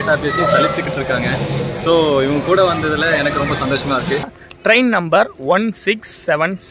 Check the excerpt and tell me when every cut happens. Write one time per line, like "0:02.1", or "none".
0:04.4

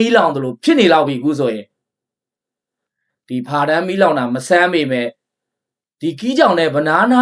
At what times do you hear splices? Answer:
none

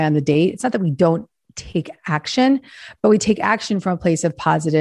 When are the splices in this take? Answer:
none

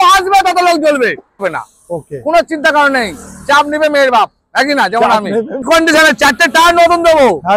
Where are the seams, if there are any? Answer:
0:01.4
0:05.6

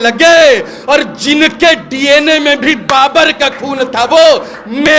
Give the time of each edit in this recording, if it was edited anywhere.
none

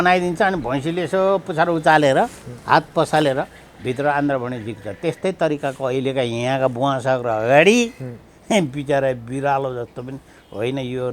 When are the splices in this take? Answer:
none

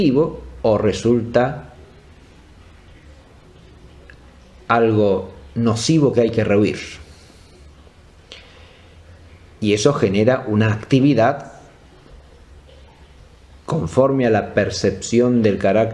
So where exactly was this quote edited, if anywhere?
0:09.7

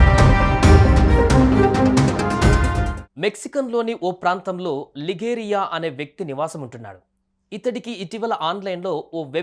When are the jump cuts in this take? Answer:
0:03.0

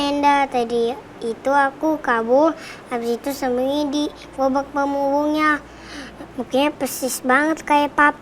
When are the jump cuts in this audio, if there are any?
none

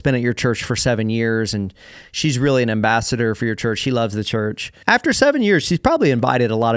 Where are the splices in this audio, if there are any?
0:04.7

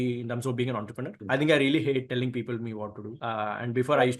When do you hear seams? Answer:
0:02.1
0:03.1

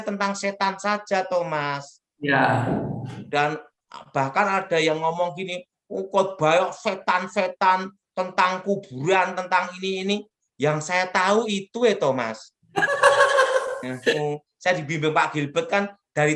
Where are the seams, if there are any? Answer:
0:14.2

